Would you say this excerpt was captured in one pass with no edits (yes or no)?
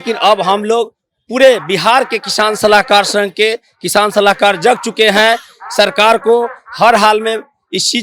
yes